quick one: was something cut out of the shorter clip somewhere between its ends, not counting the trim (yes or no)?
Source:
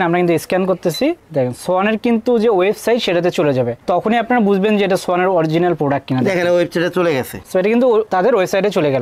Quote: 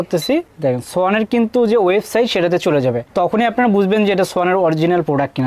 no